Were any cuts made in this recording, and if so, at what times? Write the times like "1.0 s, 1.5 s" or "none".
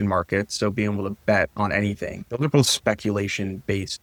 none